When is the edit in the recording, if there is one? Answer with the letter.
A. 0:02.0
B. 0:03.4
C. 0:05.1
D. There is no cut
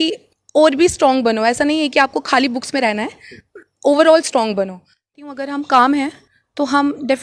C